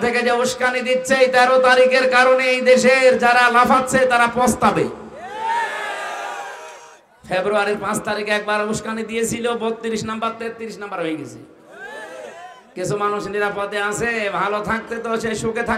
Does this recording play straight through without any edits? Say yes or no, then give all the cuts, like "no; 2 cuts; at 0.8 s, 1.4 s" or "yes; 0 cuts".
yes; 0 cuts